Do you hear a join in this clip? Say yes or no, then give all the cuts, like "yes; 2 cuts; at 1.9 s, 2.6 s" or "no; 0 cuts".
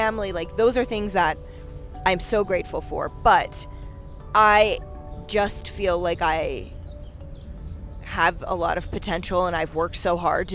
no; 0 cuts